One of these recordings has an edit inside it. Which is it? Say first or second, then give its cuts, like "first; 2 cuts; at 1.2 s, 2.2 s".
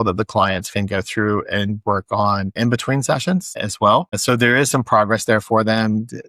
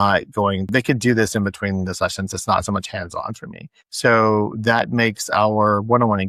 first; 2 cuts; at 2.5 s, 4.1 s